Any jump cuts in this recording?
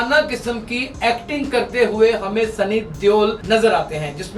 yes; 1 cut; at 3.4 s

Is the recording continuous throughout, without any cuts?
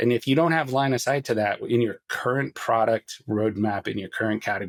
yes; 0 cuts

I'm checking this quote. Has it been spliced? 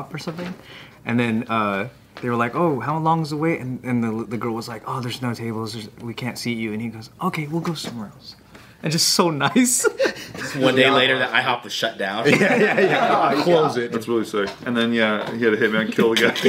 yes; 1 cut; at 13.9 s

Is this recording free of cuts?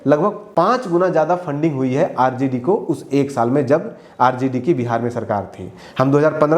yes; 0 cuts

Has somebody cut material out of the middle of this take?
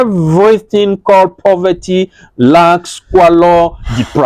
no; 0 cuts

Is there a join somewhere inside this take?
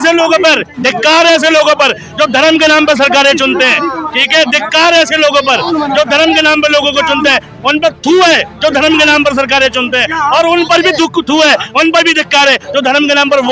no; 0 cuts

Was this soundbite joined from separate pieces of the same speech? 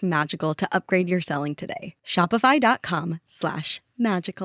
no; 0 cuts

